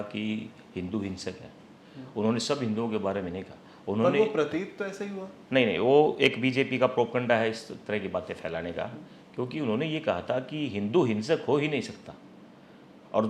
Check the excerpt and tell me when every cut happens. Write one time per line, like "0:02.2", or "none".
none